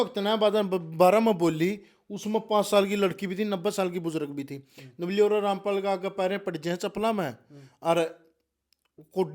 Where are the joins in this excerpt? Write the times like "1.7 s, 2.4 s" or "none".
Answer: none